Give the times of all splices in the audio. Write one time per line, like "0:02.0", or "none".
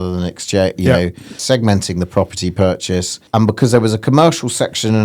0:01.4
0:03.1